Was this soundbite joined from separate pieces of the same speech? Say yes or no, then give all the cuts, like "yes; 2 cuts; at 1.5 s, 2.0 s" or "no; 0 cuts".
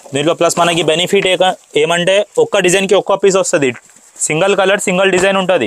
no; 0 cuts